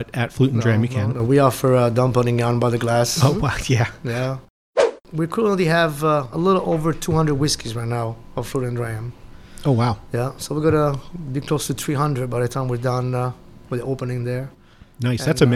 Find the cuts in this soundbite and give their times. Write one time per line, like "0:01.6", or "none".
0:04.8